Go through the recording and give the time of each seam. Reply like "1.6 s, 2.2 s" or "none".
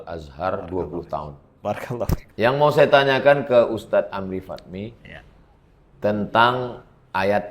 2.2 s